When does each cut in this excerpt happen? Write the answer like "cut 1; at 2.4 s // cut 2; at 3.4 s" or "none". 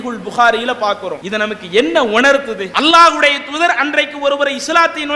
cut 1; at 1.2 s // cut 2; at 2.6 s